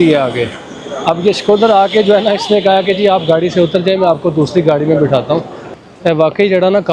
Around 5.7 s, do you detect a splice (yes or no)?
yes